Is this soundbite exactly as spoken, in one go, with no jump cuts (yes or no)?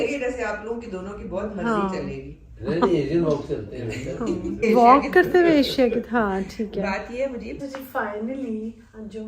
no